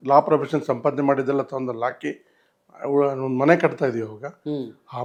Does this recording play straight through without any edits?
yes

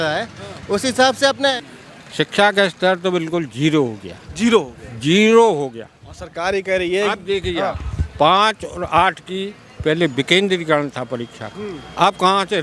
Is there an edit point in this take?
yes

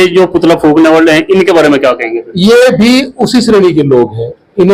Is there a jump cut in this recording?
no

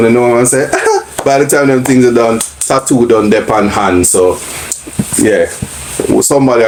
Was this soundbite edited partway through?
no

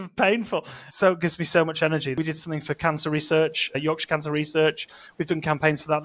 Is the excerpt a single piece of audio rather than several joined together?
no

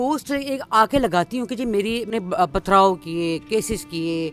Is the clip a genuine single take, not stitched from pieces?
no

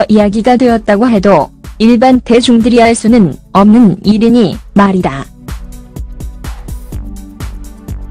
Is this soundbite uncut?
no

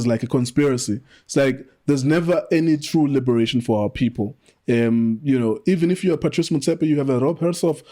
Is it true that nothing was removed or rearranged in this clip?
yes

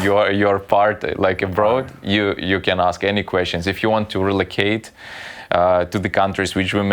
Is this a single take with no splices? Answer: yes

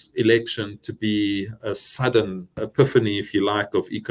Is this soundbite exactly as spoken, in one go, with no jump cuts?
no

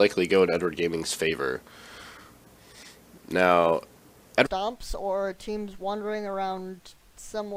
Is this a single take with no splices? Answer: yes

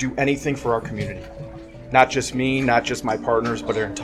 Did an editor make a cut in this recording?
no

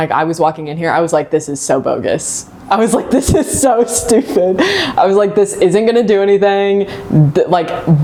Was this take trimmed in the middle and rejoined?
no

